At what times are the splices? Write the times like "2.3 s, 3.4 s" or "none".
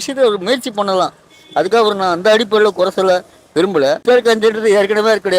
4.0 s